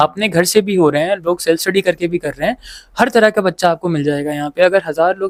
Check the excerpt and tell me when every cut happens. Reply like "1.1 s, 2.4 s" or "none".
none